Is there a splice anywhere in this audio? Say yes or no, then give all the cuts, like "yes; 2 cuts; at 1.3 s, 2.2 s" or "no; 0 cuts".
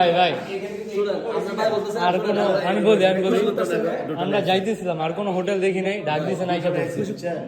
no; 0 cuts